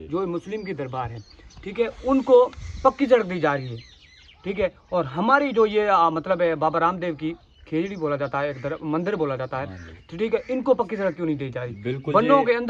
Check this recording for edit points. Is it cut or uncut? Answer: uncut